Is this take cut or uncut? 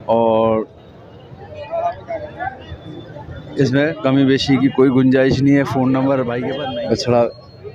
cut